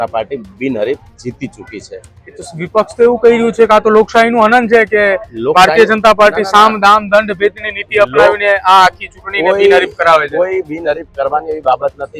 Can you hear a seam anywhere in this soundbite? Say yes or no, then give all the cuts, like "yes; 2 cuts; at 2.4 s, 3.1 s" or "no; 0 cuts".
no; 0 cuts